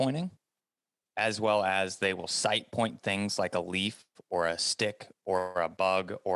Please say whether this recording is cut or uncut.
uncut